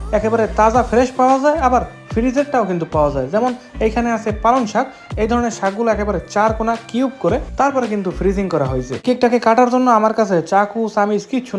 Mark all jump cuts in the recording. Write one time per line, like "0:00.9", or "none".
0:09.0